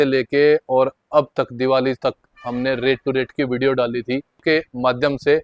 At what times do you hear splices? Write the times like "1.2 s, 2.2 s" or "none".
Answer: 4.4 s